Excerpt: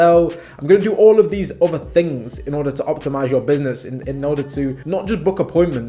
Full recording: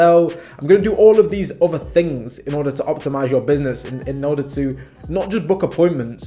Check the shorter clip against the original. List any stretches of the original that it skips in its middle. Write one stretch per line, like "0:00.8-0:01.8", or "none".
0:04.8-0:05.0